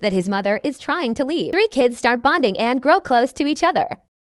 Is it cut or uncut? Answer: cut